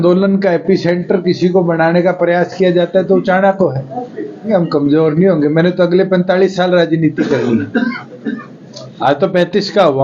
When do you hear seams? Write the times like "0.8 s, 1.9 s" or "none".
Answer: 4.4 s